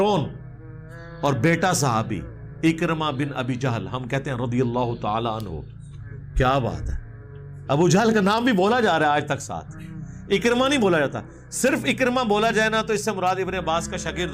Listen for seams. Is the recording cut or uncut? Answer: uncut